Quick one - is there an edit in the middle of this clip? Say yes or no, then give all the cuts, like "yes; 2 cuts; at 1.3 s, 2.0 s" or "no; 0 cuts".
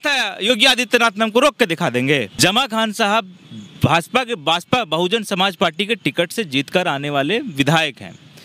yes; 1 cut; at 2.3 s